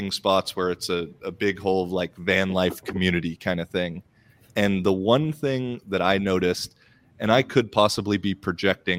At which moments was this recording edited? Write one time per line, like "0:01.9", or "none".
none